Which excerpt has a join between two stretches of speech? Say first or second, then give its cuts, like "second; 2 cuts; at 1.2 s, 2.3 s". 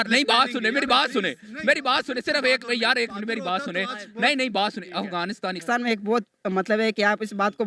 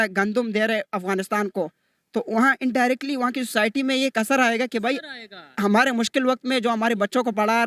first; 1 cut; at 5.6 s